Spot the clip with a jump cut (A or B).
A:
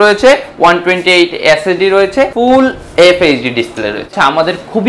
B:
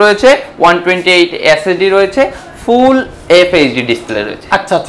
A